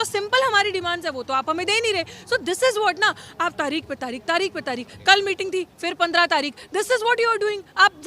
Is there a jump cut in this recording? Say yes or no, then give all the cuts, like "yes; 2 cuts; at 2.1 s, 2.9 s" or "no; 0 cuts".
no; 0 cuts